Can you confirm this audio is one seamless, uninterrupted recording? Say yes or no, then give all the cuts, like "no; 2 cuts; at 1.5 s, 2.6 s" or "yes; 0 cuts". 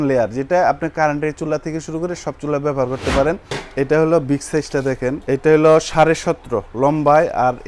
no; 1 cut; at 3.6 s